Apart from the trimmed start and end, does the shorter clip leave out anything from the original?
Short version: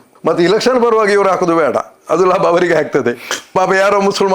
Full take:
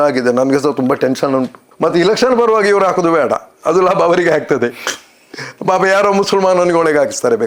yes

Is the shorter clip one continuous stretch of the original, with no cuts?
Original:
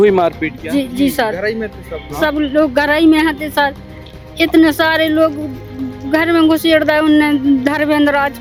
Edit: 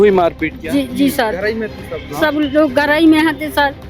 yes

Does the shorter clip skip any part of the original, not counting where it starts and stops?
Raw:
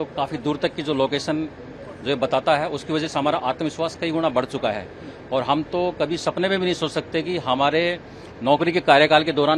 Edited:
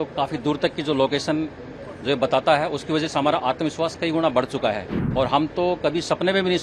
yes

